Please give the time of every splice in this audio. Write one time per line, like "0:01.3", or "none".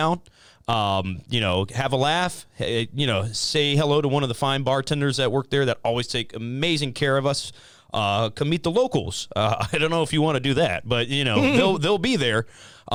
none